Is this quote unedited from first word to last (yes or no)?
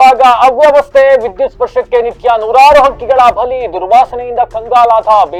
yes